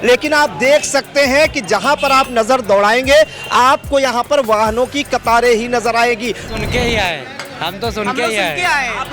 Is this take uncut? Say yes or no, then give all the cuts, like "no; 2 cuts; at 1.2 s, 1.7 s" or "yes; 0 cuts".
no; 1 cut; at 6.5 s